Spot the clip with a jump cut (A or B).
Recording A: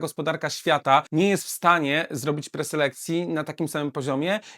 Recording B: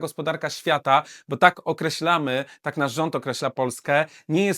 A